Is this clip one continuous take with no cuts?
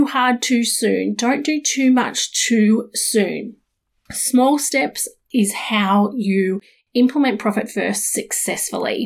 yes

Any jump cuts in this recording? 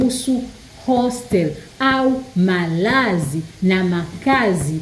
no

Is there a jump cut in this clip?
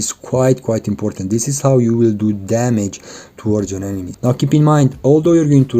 yes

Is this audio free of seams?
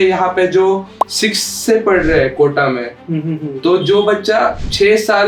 yes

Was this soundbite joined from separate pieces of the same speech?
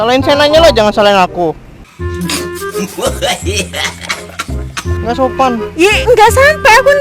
yes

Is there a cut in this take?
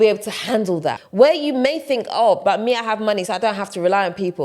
yes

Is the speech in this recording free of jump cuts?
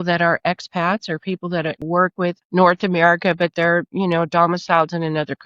no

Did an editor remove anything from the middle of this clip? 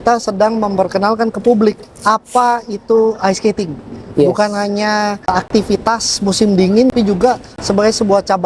yes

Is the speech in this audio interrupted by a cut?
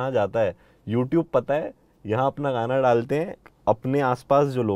yes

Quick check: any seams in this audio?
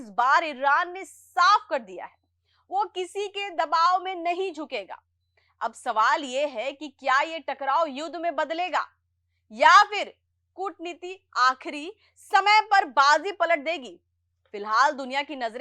no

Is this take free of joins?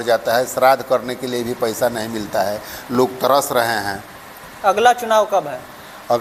yes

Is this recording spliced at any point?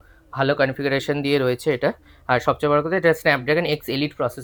no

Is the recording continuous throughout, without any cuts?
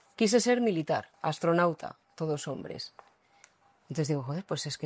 no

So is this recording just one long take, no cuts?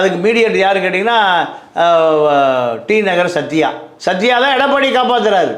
yes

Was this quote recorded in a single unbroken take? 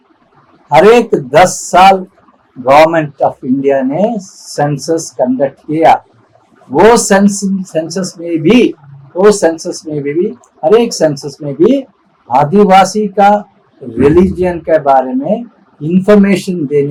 yes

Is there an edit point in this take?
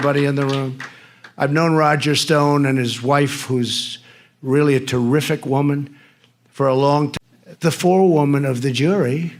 yes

